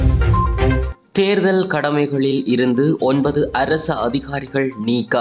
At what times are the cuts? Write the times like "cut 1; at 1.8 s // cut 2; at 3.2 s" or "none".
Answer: none

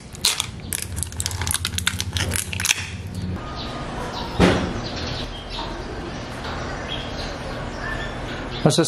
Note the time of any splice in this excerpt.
cut 1; at 3.4 s

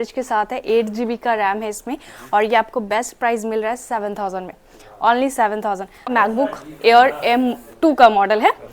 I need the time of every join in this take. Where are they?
cut 1; at 6.1 s

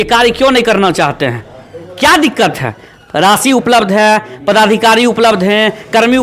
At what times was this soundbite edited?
none

